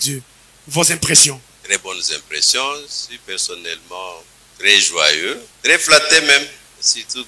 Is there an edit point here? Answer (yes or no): yes